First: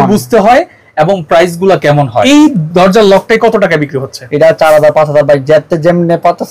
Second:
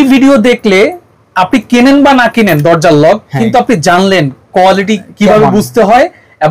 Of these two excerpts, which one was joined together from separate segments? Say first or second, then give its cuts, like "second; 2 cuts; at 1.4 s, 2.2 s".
first; 1 cut; at 2.2 s